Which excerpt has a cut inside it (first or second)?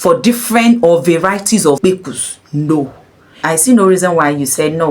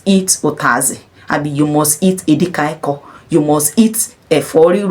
first